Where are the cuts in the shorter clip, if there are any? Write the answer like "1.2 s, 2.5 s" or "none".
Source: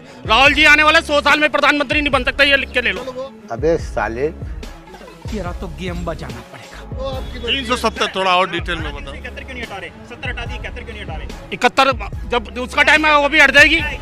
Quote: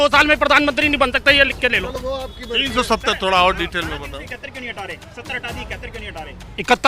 1.9 s

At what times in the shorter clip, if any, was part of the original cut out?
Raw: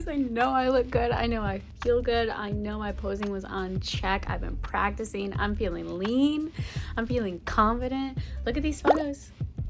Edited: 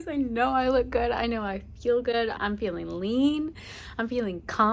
2.4 s

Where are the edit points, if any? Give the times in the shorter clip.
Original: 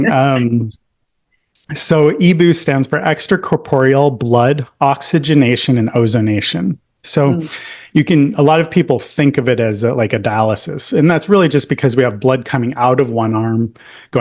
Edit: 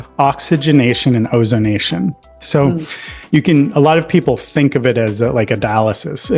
none

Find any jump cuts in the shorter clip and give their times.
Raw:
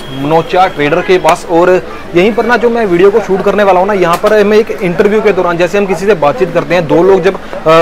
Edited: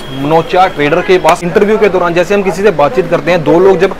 1.4 s

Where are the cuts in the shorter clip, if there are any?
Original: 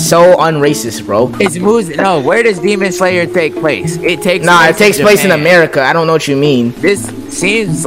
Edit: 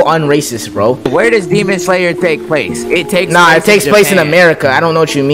1.0 s

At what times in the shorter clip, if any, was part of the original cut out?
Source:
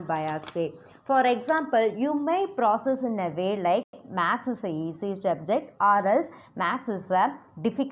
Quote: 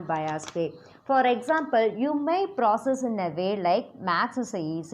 3.9 s

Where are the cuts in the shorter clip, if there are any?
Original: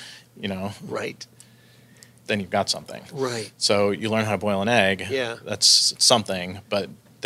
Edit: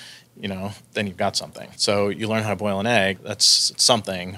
0.8 s, 1.7 s, 3.2 s

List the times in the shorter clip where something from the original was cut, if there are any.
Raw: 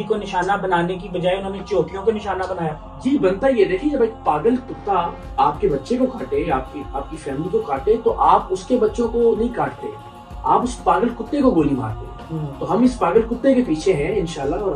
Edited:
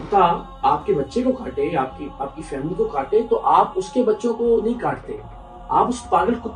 none

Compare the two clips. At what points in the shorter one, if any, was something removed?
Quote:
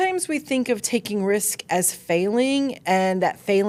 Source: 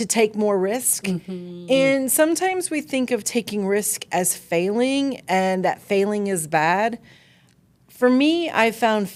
none

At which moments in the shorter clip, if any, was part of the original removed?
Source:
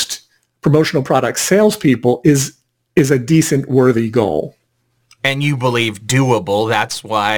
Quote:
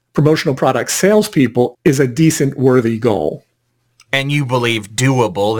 1.7 s

